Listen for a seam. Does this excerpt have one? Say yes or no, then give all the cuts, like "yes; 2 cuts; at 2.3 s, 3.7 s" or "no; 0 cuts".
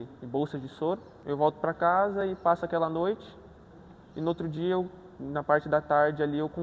yes; 1 cut; at 1.1 s